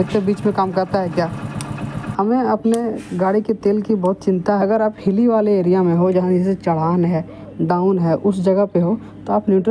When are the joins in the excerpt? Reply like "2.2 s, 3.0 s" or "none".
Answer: 2.0 s, 4.6 s